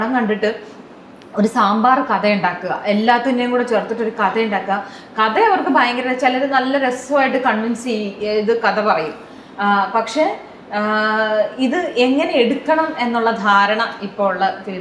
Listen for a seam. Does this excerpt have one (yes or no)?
no